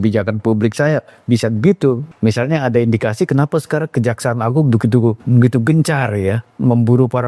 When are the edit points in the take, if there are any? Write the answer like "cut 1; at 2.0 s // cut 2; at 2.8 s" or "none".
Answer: cut 1; at 2.1 s // cut 2; at 5.2 s